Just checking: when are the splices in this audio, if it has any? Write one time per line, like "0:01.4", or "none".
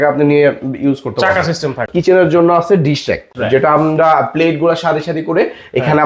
0:01.9
0:03.3

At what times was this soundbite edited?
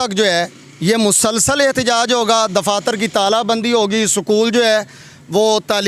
none

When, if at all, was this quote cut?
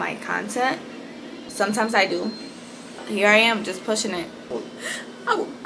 0:01.4
0:03.0
0:04.5

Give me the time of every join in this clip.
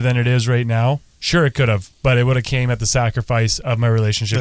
none

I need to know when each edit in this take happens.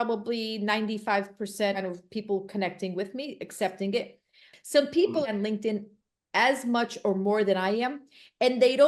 0:01.8
0:04.5

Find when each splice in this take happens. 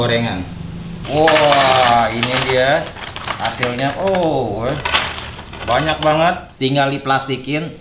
0:01.0

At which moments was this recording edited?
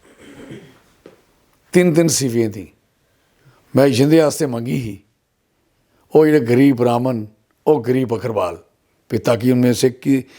none

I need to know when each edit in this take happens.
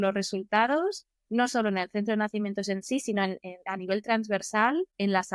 none

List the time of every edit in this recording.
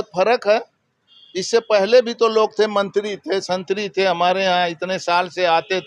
none

